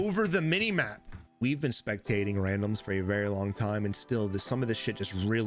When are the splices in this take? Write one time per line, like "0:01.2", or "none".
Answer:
0:01.3

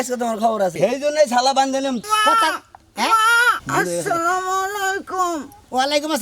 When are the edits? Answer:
0:00.8
0:02.0
0:03.6

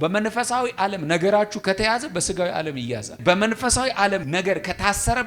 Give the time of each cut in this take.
0:03.2
0:04.3

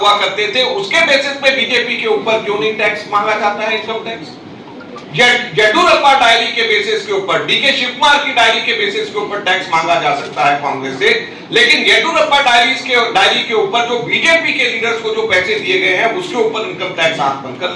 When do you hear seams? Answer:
none

